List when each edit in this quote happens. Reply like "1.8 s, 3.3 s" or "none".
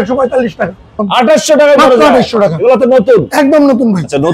0.9 s